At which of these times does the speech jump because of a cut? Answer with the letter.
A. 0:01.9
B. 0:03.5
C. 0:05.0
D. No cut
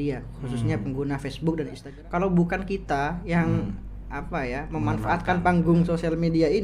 A